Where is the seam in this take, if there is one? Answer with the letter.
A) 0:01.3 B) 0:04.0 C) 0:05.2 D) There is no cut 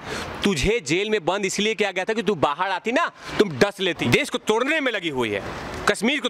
B